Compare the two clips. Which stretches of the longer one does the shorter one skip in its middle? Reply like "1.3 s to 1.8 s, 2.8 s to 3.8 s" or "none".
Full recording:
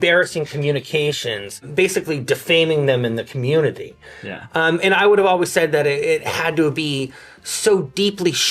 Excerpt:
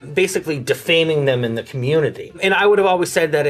4.0 s to 4.8 s